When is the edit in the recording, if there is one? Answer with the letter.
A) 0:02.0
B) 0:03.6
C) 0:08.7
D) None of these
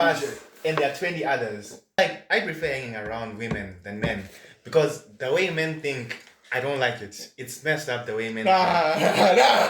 A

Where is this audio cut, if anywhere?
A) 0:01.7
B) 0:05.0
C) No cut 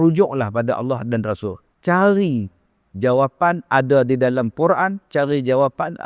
A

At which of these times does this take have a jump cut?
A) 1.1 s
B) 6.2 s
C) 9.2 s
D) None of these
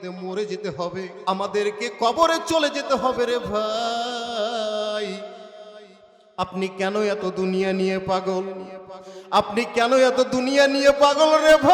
A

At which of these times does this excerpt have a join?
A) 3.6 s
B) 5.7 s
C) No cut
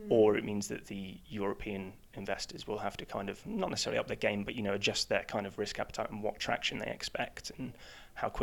C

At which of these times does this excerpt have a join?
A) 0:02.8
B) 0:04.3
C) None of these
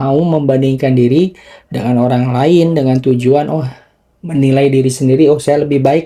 C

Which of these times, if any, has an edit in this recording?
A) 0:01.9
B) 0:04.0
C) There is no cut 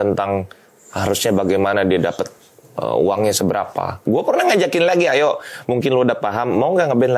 B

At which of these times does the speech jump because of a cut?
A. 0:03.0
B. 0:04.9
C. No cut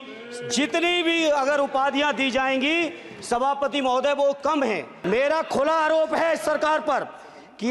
B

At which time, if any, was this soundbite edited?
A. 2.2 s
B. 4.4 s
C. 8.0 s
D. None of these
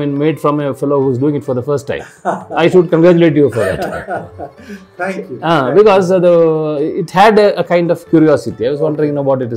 D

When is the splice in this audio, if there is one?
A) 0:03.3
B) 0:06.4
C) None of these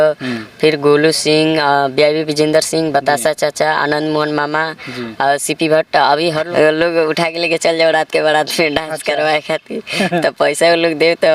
B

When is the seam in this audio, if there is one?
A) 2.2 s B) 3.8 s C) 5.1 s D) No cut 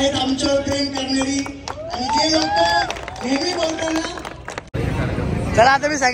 D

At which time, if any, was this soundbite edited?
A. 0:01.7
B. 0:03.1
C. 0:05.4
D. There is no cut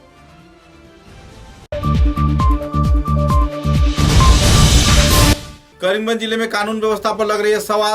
C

